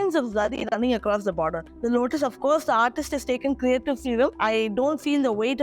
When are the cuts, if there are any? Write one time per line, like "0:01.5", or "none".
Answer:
0:01.7
0:04.4